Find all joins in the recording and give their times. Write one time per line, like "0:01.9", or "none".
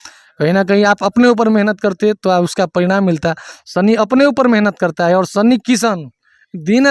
none